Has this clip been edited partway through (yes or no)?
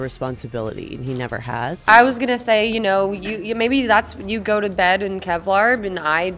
no